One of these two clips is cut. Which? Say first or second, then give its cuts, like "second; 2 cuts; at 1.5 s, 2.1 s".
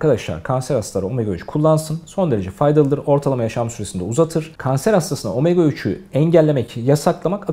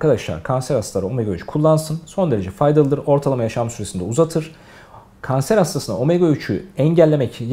first; 1 cut; at 4.5 s